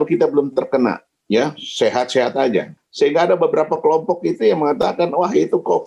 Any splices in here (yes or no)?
yes